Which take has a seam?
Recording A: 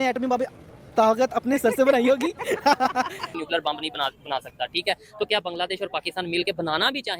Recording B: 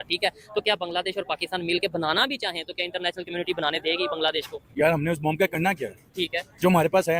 A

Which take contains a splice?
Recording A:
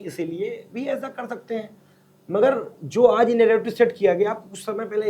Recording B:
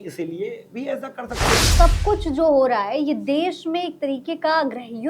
B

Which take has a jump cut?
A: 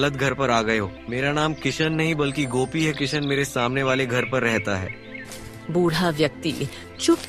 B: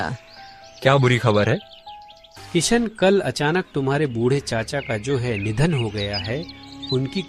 A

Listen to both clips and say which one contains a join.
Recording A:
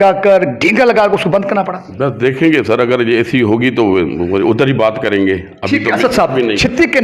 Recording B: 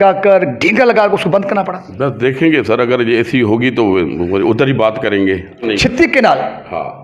B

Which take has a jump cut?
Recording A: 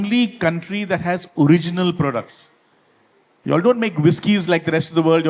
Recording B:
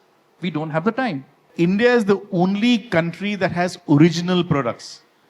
B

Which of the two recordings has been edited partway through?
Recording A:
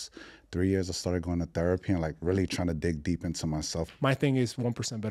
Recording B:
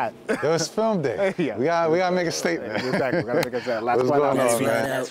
A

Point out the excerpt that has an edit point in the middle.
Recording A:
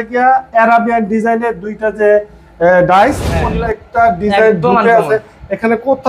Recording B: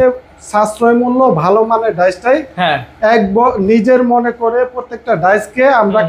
A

